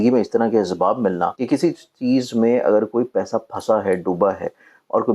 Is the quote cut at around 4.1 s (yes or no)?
no